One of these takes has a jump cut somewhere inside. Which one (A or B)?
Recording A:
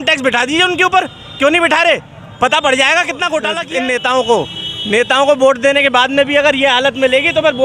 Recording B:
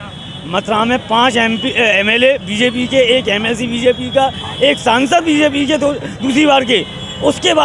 A